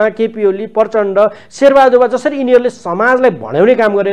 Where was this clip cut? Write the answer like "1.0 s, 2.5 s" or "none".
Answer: none